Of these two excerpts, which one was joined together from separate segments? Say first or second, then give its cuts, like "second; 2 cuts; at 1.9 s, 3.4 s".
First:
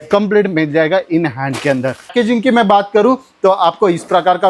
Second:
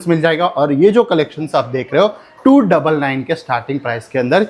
first; 1 cut; at 2.1 s